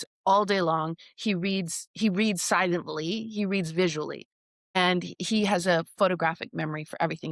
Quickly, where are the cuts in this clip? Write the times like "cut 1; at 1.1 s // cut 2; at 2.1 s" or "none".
none